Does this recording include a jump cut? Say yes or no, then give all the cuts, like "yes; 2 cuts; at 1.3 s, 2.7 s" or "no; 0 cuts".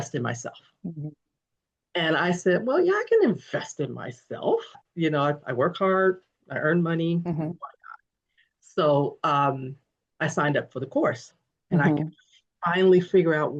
no; 0 cuts